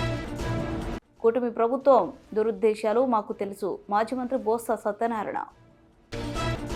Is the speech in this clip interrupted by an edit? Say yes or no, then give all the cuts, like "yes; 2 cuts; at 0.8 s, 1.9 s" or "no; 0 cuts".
no; 0 cuts